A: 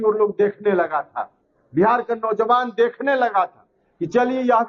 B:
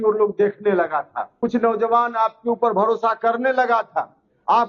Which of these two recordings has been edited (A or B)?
B